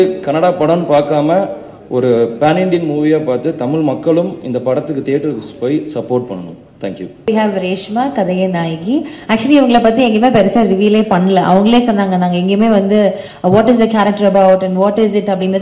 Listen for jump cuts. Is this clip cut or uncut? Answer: uncut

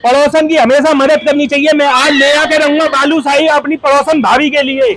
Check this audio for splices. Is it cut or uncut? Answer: uncut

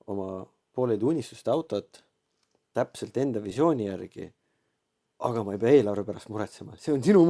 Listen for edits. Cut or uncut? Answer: uncut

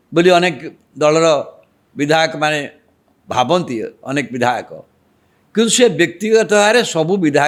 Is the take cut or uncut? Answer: uncut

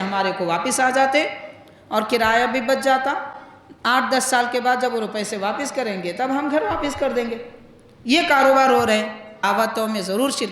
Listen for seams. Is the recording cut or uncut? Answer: cut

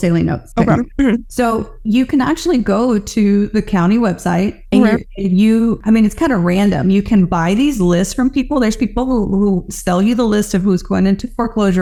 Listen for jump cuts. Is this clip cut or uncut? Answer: uncut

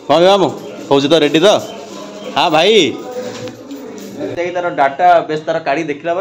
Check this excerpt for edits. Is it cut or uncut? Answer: cut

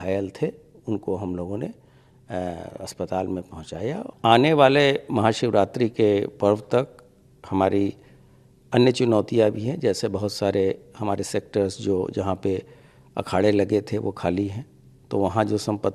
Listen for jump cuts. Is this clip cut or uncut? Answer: cut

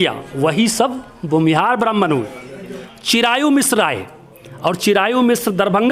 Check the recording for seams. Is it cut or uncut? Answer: cut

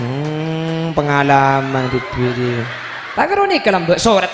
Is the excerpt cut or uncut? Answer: cut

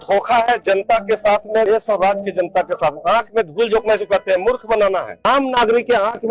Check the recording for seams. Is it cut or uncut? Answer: cut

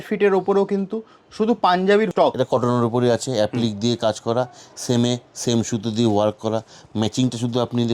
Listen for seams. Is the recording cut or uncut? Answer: cut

